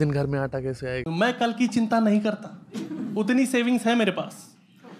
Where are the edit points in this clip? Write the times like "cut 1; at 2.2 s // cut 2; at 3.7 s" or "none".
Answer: cut 1; at 1.0 s